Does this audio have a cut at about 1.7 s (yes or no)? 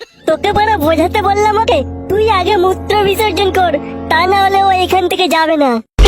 yes